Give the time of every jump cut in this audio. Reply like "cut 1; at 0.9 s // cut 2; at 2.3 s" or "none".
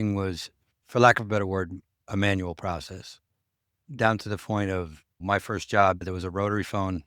cut 1; at 6.0 s